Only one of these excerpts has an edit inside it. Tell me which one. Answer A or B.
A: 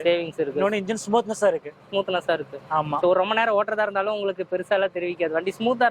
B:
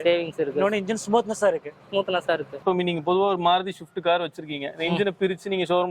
B